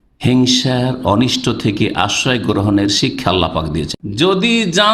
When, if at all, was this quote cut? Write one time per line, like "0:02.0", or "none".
0:03.9

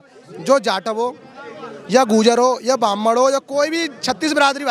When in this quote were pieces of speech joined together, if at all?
none

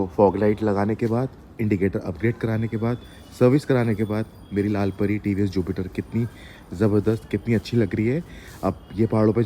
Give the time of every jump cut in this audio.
none

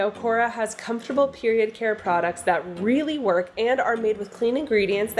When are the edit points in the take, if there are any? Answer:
none

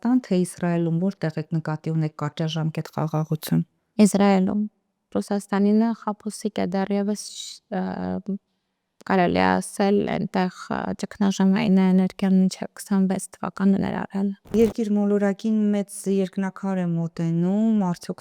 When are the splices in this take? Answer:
0:14.5

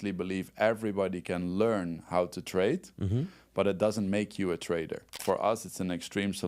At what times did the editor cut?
0:05.1

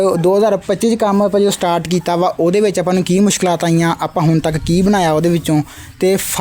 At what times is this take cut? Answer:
none

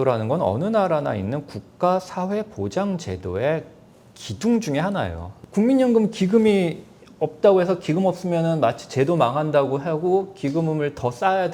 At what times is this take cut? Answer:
0:05.3

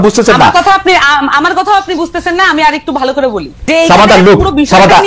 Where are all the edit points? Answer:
0:03.5

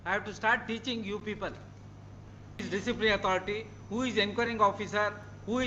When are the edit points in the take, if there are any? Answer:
0:02.6

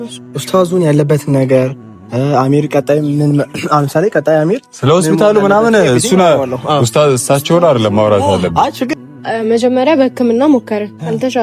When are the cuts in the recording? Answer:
0:08.9

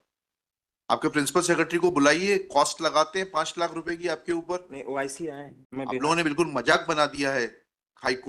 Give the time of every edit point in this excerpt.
0:05.5

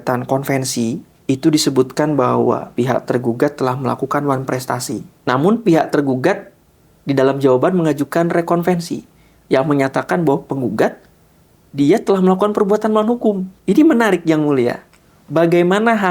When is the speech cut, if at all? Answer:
0:01.1
0:02.7
0:05.1
0:13.5

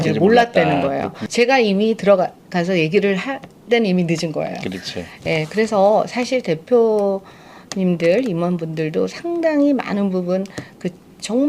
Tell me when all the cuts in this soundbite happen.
0:01.2

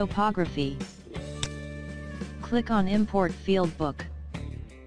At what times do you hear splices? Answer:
0:03.9

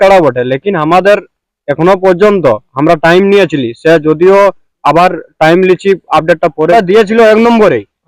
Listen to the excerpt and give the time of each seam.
0:06.7

